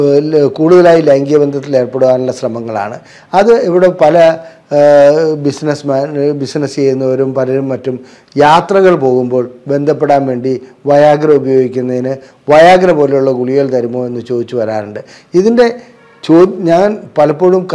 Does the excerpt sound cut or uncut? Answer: uncut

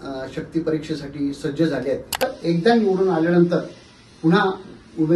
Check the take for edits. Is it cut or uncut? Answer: cut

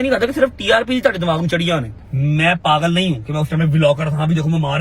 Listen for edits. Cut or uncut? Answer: cut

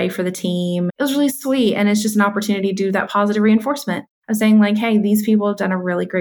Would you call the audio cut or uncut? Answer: cut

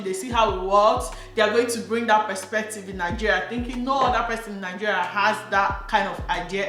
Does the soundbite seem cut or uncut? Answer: uncut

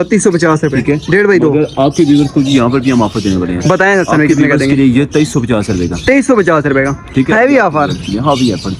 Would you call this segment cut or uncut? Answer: uncut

